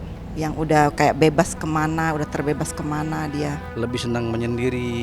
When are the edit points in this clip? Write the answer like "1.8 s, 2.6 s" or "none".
3.7 s